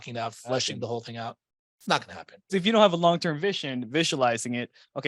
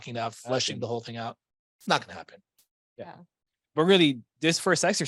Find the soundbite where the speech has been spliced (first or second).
first